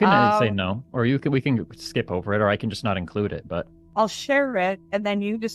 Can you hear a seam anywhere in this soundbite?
yes; 1 cut; at 3.8 s

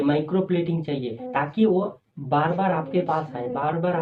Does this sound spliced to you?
yes; 1 cut; at 1.2 s

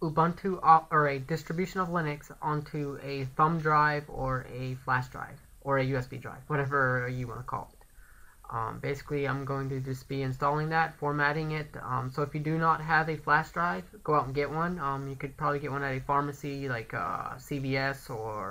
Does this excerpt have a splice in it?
yes; 1 cut; at 11.3 s

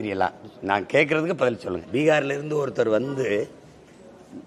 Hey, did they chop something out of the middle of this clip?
yes; 1 cut; at 1.8 s

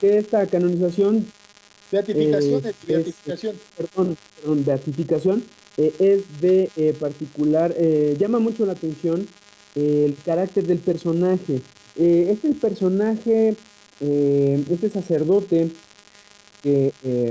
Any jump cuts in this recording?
yes; 1 cut; at 4.1 s

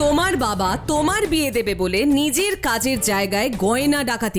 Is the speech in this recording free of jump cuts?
yes; 0 cuts

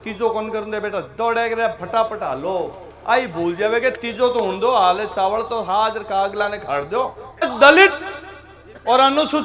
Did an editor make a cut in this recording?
yes; 1 cut; at 7.5 s

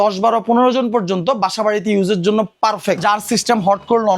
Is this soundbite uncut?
no; 1 cut; at 3.0 s

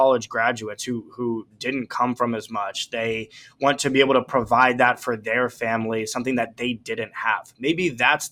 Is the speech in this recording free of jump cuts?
yes; 0 cuts

